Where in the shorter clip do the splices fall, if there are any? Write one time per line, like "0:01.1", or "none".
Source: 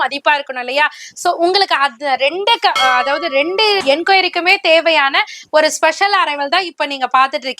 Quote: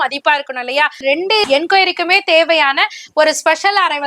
0:01.3